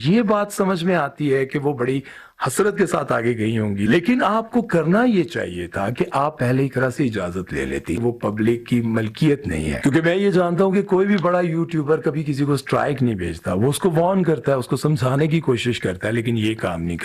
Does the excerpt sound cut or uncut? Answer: cut